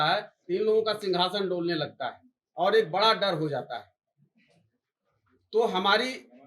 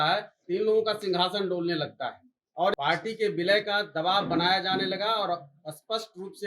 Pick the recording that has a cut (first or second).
second